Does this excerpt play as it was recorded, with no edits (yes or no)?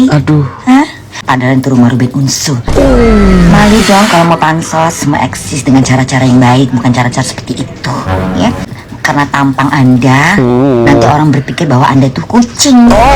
no